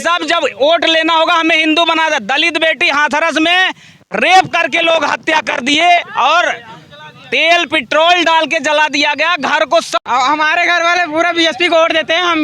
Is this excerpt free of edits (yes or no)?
no